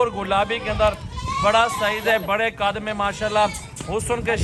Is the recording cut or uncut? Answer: uncut